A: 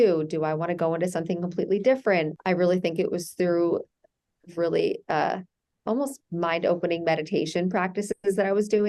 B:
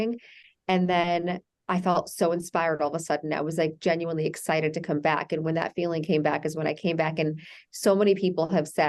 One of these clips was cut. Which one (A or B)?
A